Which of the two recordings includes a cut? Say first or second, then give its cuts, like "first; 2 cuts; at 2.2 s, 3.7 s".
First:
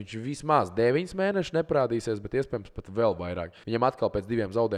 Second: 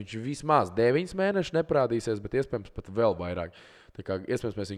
first; 1 cut; at 3.5 s